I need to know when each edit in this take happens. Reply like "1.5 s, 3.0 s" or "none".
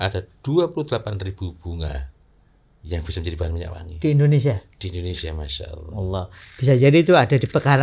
none